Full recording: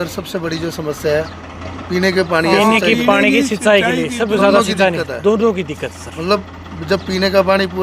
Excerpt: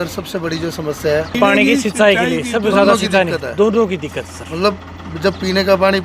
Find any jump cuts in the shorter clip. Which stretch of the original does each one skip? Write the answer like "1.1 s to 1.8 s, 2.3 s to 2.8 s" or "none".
1.3 s to 3.0 s